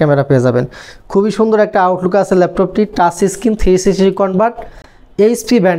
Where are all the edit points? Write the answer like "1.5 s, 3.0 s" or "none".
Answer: none